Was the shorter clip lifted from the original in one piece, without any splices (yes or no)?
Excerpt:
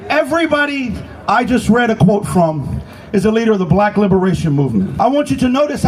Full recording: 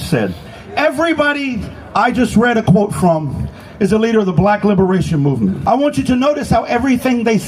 yes